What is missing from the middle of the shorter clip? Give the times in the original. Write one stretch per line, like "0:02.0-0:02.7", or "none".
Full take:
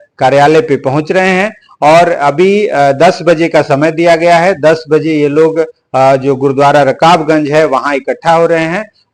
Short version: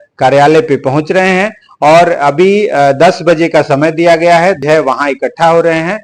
0:04.6-0:07.4